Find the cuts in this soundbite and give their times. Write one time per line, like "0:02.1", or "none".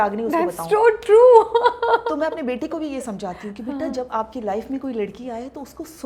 none